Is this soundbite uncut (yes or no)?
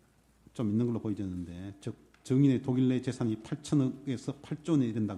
yes